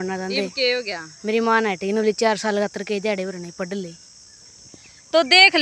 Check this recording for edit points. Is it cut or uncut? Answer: uncut